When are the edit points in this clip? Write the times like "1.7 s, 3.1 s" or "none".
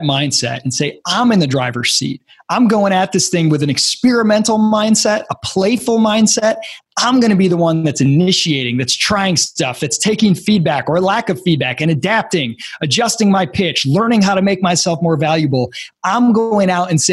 none